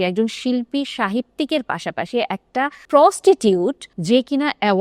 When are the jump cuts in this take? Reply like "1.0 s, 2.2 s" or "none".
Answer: 2.8 s, 3.9 s